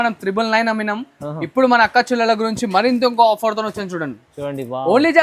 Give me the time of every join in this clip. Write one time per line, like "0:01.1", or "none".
none